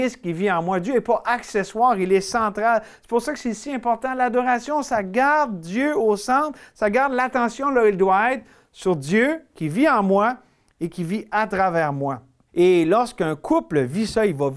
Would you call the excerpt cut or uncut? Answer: uncut